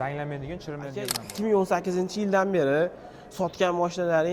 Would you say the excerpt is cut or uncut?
cut